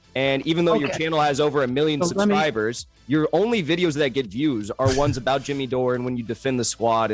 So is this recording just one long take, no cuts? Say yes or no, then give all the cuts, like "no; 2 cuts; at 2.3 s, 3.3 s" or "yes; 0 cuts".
yes; 0 cuts